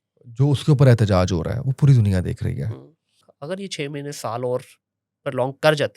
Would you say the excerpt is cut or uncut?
cut